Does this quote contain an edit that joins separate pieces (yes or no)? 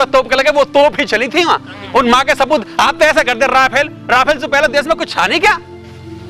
no